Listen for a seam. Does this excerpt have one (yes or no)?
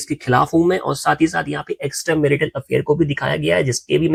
no